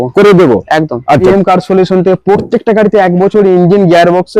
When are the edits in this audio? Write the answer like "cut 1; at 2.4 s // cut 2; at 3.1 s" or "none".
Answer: cut 1; at 1.2 s